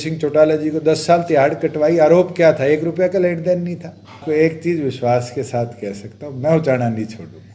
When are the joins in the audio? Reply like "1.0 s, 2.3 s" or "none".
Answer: 4.2 s